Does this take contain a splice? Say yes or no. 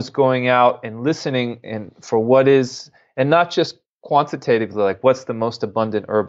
no